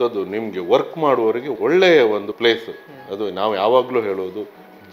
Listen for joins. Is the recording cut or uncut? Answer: cut